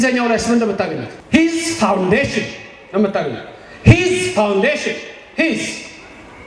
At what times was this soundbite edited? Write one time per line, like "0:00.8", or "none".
0:01.1

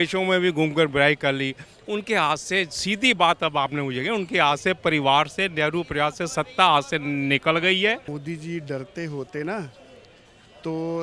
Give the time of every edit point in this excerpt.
0:08.1

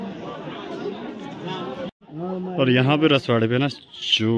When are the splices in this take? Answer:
0:01.9

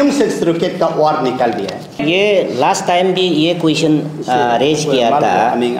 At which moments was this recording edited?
0:02.0

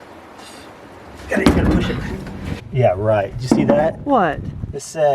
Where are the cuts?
0:02.5

